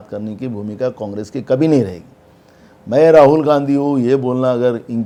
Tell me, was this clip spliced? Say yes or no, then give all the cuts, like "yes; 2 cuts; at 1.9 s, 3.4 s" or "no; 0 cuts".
no; 0 cuts